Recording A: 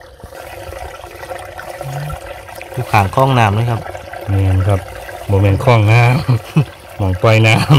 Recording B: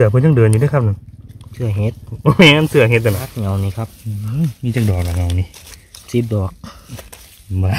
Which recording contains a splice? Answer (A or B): B